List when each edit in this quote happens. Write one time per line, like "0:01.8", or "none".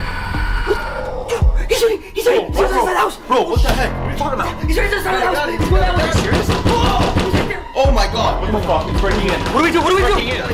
none